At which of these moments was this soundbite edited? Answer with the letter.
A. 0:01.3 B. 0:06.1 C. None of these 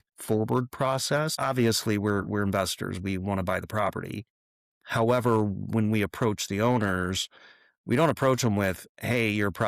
A